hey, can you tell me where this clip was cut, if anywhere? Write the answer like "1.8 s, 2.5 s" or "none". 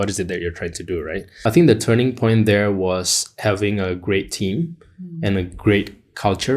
1.3 s